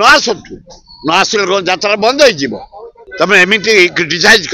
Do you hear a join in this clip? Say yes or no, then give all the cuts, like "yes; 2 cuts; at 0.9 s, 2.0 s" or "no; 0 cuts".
yes; 1 cut; at 3.0 s